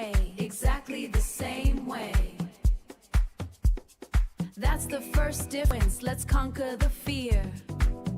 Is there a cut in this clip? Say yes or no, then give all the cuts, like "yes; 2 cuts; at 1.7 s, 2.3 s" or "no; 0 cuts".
yes; 1 cut; at 5.7 s